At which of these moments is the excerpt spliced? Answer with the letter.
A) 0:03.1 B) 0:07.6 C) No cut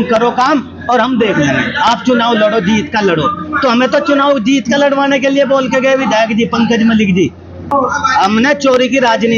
B